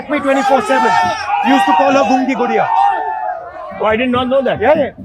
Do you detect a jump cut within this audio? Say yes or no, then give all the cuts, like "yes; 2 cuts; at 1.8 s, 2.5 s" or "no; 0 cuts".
no; 0 cuts